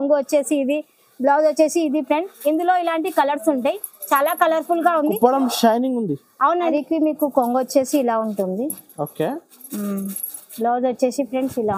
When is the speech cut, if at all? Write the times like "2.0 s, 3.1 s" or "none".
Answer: 6.6 s